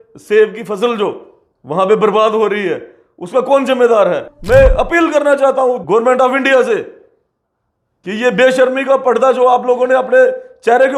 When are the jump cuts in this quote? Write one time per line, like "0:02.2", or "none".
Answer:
0:04.3
0:05.8